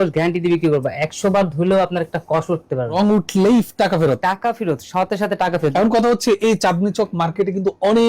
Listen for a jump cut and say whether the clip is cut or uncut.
cut